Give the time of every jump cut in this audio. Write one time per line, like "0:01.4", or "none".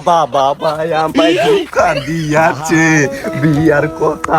none